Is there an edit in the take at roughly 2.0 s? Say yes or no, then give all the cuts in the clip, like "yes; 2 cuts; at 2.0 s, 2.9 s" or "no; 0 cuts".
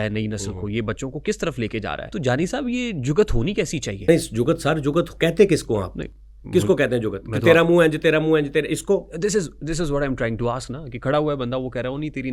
yes; 2 cuts; at 2.0 s, 4.0 s